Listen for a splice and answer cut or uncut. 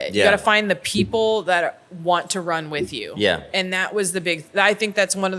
uncut